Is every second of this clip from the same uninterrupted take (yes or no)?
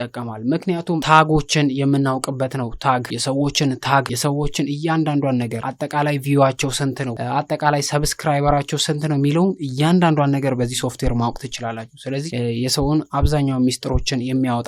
no